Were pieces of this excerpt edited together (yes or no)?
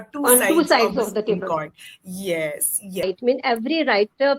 yes